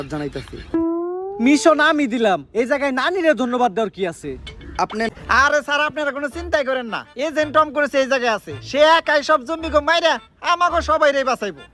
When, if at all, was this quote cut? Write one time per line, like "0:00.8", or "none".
0:05.1